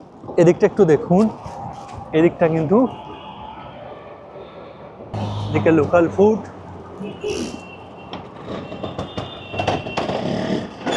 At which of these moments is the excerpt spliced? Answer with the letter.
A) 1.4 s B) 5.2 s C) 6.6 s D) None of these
B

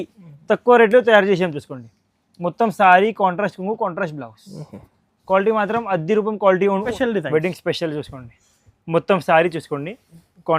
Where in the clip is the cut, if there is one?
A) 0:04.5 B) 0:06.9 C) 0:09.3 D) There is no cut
B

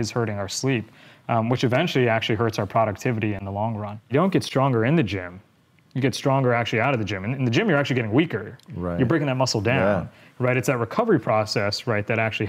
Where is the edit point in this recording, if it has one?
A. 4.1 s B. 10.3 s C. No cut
A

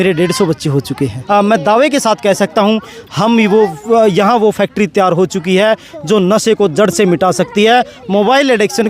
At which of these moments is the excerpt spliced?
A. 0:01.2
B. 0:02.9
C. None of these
A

